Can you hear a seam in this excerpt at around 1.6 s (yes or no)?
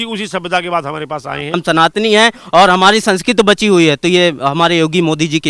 yes